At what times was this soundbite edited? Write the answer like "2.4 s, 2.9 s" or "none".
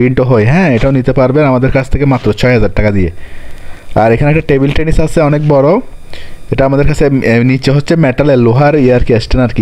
none